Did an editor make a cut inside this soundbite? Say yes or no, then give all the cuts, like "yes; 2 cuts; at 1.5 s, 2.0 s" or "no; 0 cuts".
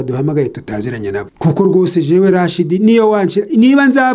yes; 1 cut; at 1.3 s